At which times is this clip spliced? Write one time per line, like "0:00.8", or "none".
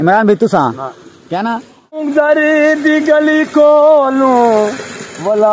0:02.0